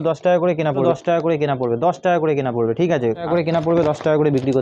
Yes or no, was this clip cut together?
yes